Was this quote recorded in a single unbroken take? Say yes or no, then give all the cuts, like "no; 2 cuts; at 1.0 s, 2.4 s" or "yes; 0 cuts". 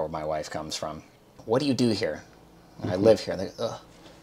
no; 1 cut; at 1.2 s